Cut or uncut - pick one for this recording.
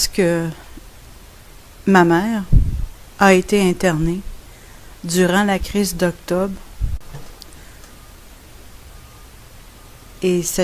uncut